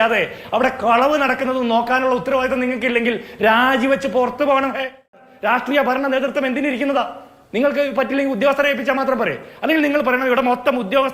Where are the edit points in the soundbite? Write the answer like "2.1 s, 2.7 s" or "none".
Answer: 5.2 s